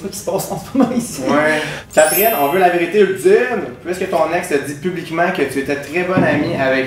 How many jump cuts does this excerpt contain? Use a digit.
1